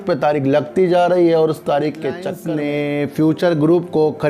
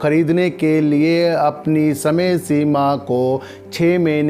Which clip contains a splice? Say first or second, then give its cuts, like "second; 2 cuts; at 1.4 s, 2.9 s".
first; 1 cut; at 2.3 s